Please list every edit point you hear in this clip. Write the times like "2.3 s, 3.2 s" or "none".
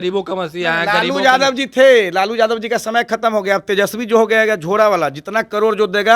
none